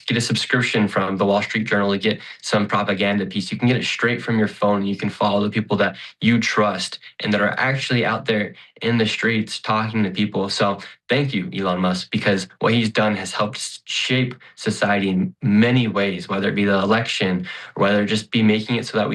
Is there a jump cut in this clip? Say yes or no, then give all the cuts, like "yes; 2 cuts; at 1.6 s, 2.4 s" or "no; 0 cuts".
no; 0 cuts